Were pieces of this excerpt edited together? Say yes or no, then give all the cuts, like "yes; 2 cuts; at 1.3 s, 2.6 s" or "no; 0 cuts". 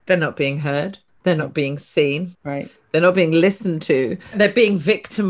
yes; 3 cuts; at 1.0 s, 2.4 s, 4.3 s